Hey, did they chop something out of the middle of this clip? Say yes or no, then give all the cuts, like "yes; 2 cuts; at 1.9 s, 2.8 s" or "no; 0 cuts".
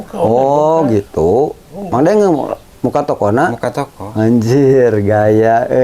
no; 0 cuts